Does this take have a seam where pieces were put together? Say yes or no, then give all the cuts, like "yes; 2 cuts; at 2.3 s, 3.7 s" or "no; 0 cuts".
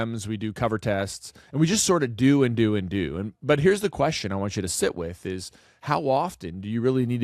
no; 0 cuts